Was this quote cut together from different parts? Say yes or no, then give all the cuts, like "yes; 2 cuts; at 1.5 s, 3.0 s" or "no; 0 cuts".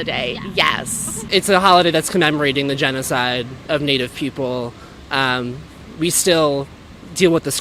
yes; 1 cut; at 1.2 s